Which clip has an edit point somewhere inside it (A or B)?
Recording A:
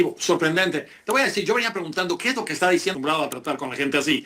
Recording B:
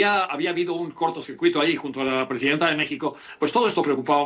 A